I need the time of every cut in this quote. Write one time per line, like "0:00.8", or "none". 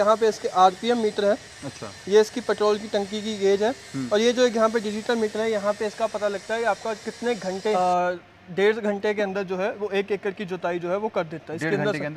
0:07.8